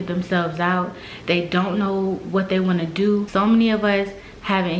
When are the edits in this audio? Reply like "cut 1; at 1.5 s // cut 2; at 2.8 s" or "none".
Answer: cut 1; at 3.3 s